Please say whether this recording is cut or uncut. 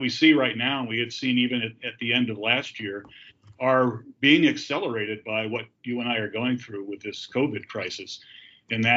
uncut